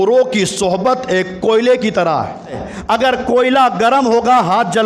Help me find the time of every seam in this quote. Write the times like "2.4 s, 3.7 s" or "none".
2.7 s